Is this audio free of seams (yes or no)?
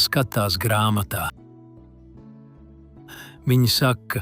yes